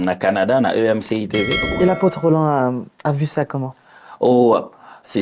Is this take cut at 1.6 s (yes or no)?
yes